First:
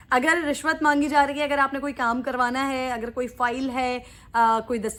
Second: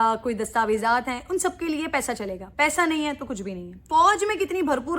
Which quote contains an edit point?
second; 1 cut; at 3.8 s

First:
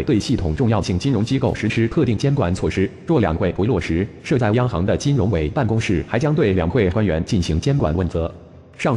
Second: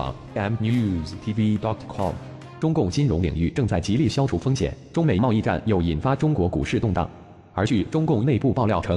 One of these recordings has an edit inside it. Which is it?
second; 1 cut; at 2.3 s

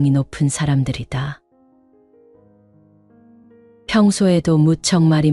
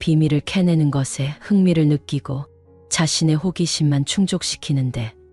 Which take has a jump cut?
first; 2 cuts; at 1.4 s, 3.2 s

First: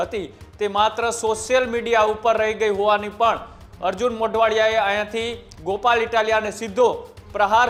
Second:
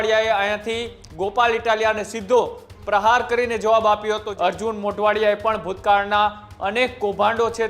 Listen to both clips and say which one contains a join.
second; 1 cut; at 4.3 s

